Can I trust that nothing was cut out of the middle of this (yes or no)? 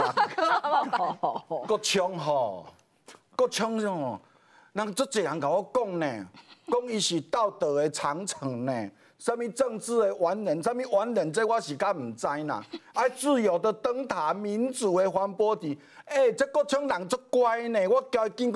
yes